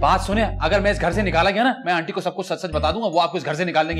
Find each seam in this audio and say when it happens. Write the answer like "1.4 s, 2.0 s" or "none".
none